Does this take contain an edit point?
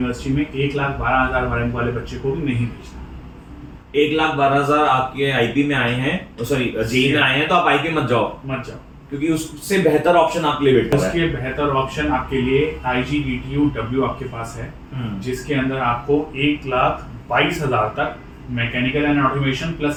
no; 0 cuts

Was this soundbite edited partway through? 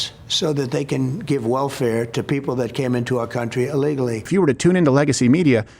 yes; 1 cut; at 4.3 s

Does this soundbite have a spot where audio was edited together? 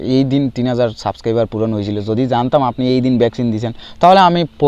no; 0 cuts

